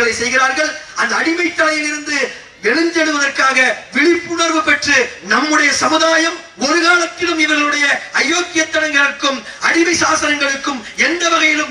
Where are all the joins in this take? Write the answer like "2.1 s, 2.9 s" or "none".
none